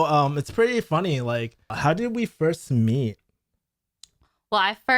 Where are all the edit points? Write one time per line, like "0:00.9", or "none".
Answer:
0:01.7